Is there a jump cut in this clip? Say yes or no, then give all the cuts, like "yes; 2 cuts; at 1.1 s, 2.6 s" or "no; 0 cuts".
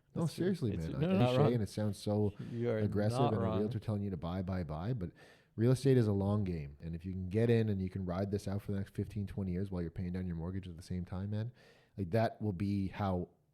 yes; 2 cuts; at 1.2 s, 6.9 s